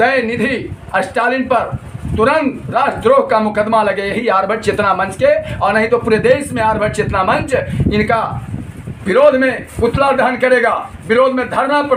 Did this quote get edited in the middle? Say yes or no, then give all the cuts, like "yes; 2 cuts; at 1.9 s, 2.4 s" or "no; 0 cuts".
no; 0 cuts